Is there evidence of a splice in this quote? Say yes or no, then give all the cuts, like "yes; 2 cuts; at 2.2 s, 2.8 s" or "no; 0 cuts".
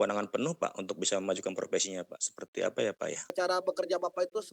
yes; 1 cut; at 3.3 s